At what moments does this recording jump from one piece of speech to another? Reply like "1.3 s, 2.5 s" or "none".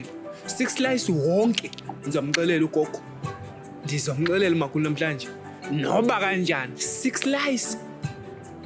2.0 s